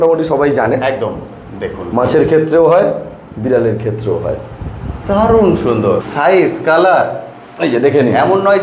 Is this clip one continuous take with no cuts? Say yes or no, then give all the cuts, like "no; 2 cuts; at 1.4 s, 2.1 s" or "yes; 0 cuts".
no; 1 cut; at 6.1 s